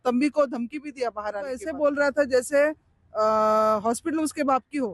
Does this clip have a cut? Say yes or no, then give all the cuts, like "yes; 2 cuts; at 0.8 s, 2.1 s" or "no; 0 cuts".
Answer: yes; 1 cut; at 1.7 s